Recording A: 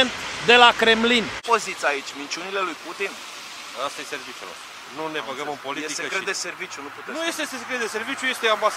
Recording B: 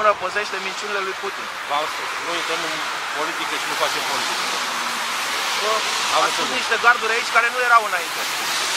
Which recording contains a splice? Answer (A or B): A